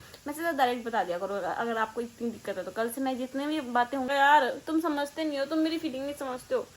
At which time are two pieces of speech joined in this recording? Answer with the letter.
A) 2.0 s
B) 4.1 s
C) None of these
B